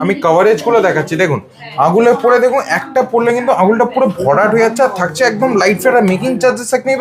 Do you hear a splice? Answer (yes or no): no